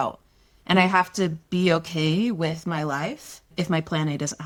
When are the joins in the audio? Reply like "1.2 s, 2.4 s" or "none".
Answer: none